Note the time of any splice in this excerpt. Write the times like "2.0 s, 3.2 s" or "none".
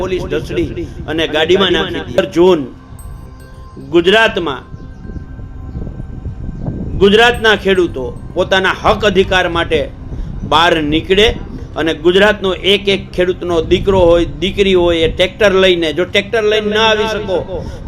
2.2 s